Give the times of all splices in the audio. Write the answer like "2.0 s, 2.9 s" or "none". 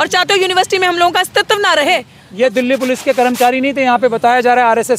2.2 s